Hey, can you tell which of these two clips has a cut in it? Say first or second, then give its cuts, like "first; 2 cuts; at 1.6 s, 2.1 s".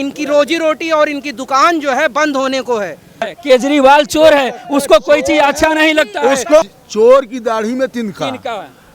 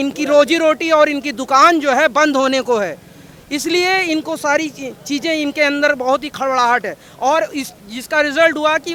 first; 2 cuts; at 3.3 s, 6.7 s